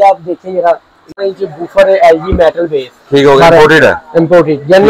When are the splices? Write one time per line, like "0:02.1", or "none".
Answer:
0:01.1